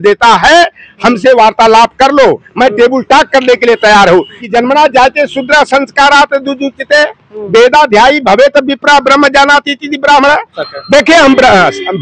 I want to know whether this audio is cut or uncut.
cut